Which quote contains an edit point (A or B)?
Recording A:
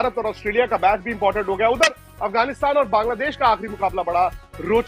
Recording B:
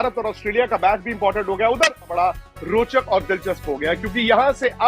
B